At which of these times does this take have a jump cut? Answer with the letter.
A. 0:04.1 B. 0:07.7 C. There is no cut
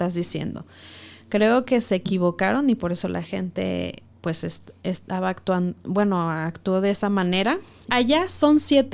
B